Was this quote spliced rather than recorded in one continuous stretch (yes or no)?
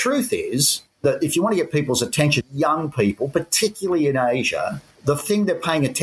yes